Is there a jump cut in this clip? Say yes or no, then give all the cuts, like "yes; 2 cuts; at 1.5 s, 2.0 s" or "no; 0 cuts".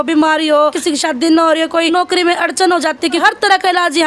yes; 3 cuts; at 0.8 s, 1.9 s, 3.2 s